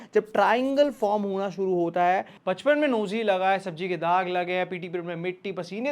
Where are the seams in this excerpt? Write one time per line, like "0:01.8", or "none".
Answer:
0:02.3